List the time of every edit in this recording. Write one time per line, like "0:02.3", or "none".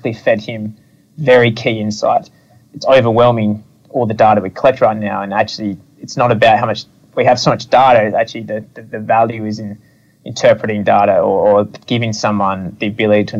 0:02.7